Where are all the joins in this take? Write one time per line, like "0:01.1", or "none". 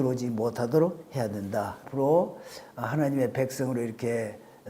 0:01.8